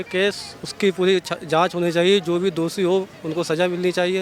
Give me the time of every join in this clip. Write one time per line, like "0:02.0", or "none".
none